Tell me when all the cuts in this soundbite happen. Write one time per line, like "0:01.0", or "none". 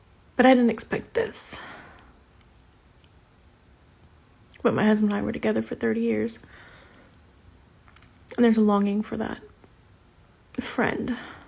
0:03.0